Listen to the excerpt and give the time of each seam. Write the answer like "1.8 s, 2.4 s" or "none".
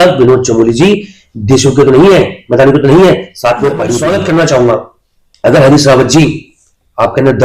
3.9 s